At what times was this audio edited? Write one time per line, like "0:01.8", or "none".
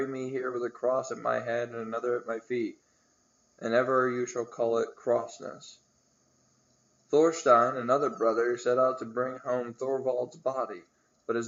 none